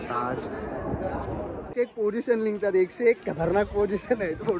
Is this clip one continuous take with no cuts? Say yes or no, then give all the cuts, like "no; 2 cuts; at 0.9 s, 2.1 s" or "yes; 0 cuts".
no; 1 cut; at 1.6 s